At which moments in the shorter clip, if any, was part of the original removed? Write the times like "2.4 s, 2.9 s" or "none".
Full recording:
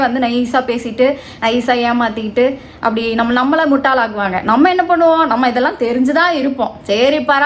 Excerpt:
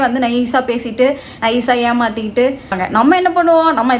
2.7 s